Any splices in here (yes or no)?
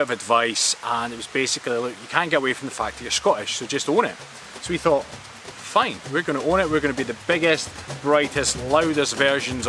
no